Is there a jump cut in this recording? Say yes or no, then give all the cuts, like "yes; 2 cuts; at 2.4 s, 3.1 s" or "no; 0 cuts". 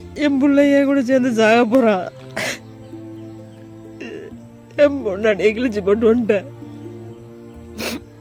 no; 0 cuts